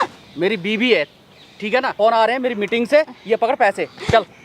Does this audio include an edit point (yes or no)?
yes